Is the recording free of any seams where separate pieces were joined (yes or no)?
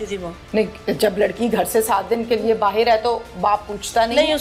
yes